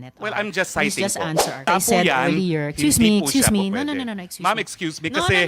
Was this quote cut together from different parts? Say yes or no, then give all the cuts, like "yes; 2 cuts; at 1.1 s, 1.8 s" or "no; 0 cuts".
yes; 1 cut; at 1.7 s